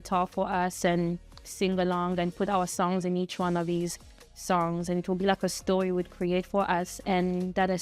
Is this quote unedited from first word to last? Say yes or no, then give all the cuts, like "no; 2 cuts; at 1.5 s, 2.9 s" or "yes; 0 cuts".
yes; 0 cuts